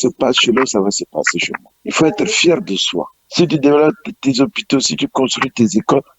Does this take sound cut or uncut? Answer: uncut